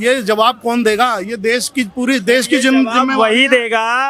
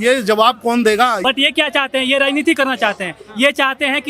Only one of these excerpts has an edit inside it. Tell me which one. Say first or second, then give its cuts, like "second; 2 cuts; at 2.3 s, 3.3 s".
second; 1 cut; at 1.2 s